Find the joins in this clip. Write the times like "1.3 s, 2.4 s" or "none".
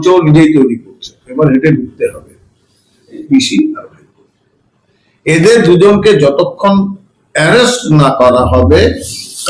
3.2 s